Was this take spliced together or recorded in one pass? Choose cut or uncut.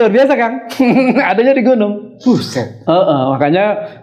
uncut